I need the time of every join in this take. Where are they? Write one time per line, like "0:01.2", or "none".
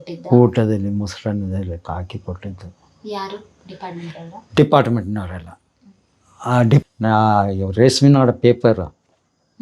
0:06.9